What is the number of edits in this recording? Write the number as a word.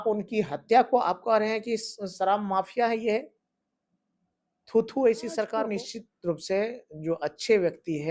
one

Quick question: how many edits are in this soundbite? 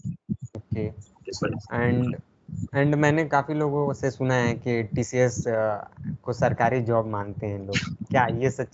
zero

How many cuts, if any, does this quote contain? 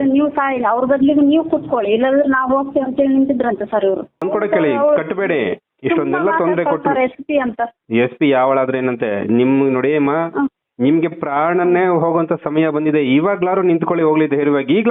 one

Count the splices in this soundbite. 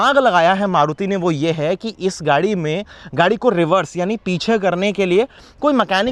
zero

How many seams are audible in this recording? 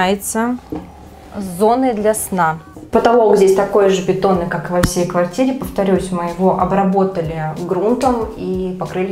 one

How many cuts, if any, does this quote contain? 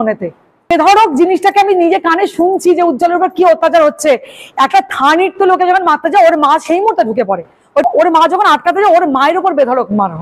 two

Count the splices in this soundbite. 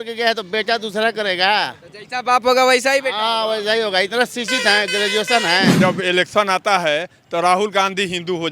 one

